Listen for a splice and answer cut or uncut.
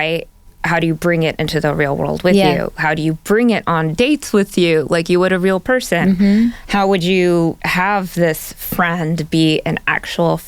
uncut